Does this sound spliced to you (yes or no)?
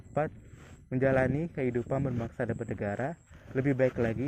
no